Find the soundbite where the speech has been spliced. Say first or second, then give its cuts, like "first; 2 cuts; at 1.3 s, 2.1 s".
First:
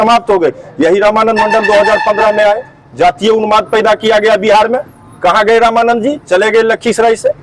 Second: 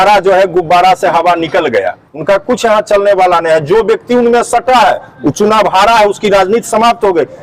second; 1 cut; at 2.1 s